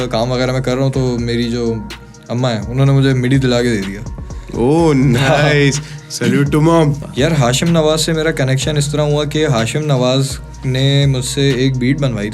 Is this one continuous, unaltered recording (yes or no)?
no